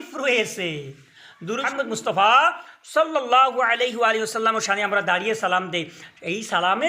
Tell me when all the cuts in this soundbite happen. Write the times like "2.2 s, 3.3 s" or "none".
1.7 s